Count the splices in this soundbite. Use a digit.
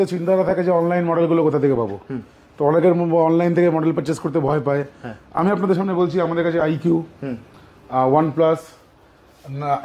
0